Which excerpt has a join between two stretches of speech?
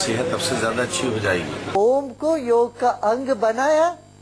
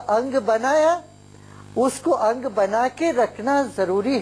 first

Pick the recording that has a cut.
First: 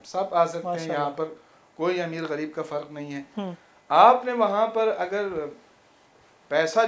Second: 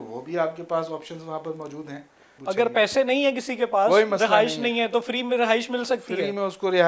second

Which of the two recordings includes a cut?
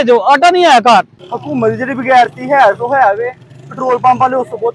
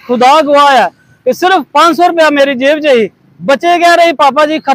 first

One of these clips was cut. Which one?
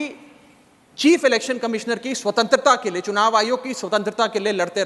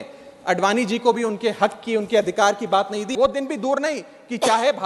second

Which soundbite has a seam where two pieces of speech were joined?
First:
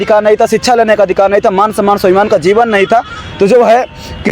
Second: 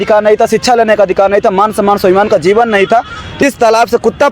second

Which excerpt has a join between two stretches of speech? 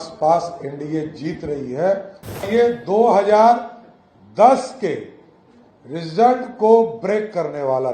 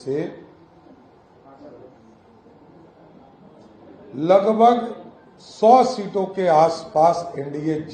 first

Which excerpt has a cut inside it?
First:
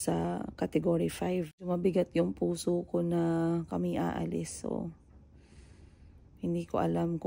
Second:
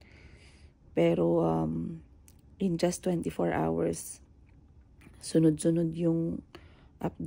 first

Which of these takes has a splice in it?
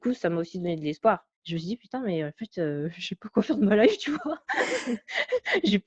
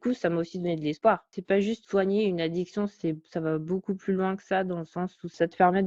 second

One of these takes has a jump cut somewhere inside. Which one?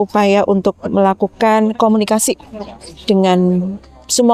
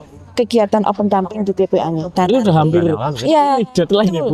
second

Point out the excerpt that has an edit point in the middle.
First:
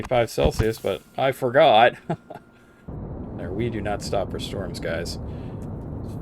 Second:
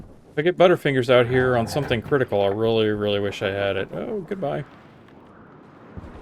first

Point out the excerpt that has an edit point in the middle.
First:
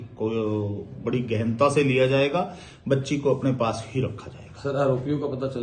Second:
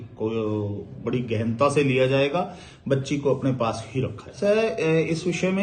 second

